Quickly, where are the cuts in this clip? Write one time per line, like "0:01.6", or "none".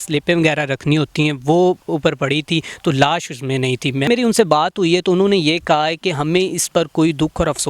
0:04.1